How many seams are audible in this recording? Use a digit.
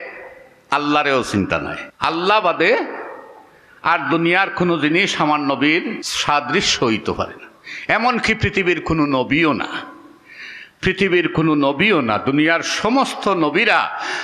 2